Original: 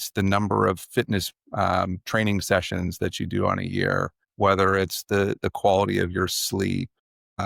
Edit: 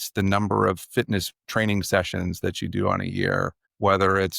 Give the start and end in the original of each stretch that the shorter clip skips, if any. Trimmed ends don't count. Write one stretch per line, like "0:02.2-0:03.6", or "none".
0:01.4-0:02.0